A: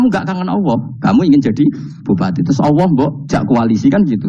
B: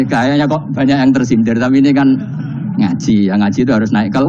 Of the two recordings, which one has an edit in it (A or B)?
A